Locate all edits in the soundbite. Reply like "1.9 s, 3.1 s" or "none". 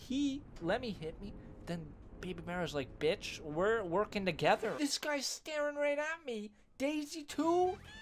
4.8 s